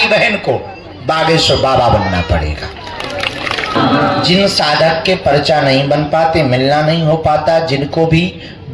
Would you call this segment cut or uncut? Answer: cut